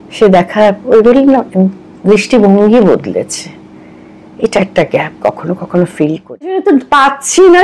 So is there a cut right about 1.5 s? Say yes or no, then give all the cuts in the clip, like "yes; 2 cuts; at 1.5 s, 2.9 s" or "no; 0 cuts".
no; 1 cut; at 6.6 s